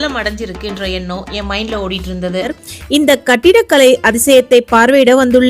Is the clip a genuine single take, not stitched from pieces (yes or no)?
no